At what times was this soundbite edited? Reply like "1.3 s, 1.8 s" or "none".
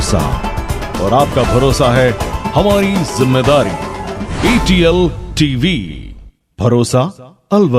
none